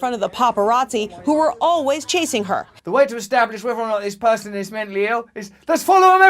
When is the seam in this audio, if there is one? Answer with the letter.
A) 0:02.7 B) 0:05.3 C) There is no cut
A